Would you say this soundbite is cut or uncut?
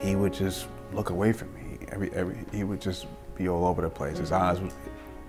uncut